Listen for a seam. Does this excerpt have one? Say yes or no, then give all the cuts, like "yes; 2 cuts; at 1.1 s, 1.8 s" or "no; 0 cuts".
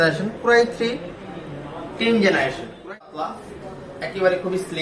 yes; 1 cut; at 3.0 s